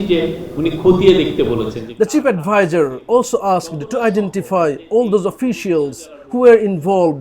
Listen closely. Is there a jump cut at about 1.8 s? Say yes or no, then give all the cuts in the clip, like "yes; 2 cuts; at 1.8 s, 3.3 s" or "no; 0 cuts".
yes; 1 cut; at 1.8 s